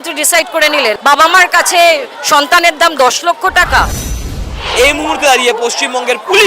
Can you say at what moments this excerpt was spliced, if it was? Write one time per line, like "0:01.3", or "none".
0:01.0
0:04.5